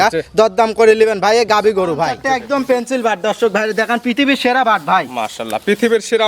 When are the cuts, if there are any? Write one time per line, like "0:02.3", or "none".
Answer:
0:02.2

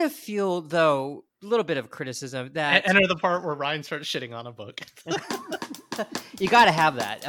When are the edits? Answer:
0:01.3

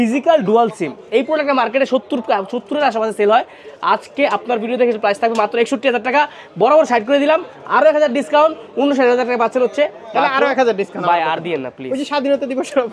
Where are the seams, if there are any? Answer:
none

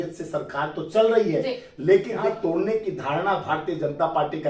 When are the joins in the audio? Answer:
0:02.2

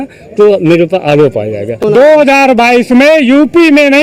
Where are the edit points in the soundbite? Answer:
0:01.7

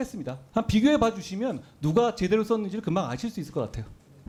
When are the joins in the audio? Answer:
none

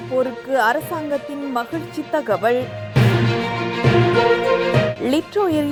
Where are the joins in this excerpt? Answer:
none

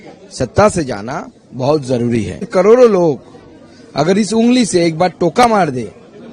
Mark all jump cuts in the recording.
0:02.5

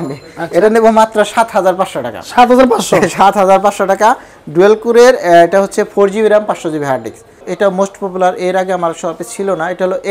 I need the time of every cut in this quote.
0:07.4

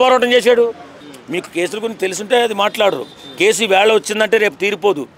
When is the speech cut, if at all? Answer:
0:01.0

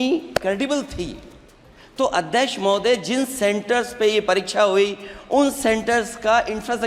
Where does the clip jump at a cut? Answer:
none

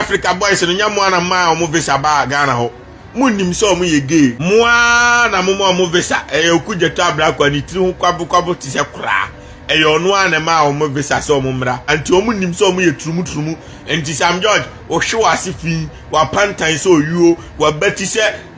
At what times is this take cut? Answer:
0:04.4
0:11.9

